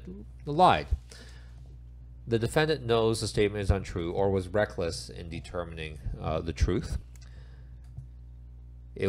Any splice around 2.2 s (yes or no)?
no